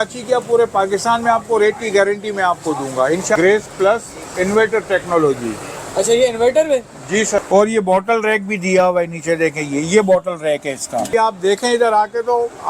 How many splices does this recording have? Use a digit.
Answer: 3